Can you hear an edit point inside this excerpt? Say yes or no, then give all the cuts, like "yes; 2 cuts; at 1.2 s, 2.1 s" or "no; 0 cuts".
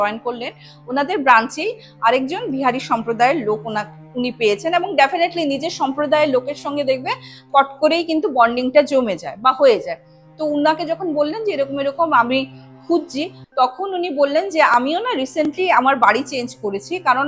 no; 0 cuts